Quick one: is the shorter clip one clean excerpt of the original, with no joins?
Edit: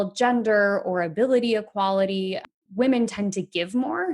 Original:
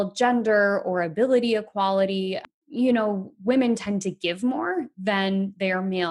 no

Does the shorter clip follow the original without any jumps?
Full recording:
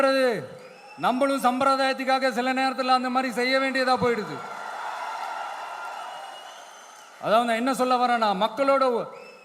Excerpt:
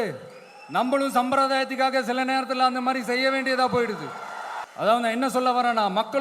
no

